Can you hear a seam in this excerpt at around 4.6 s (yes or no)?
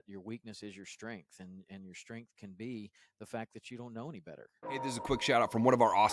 yes